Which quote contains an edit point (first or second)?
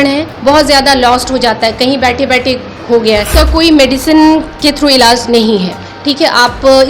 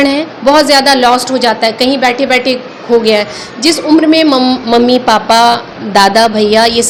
first